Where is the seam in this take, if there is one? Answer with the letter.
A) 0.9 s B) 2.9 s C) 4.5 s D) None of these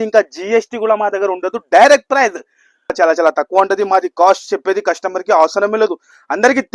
B